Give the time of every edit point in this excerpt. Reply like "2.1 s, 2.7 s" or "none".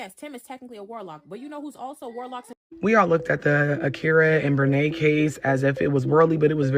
2.6 s